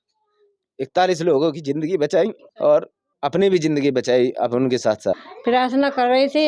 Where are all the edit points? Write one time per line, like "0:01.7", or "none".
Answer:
0:02.4
0:03.0
0:05.3